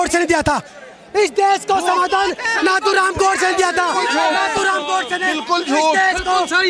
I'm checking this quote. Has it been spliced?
no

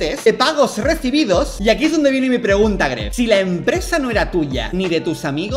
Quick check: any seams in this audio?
yes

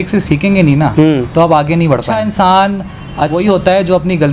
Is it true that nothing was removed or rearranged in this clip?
no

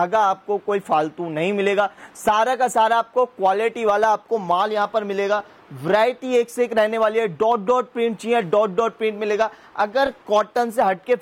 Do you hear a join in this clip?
no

